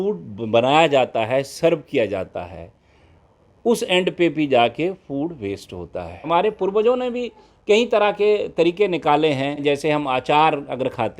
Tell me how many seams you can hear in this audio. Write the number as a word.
two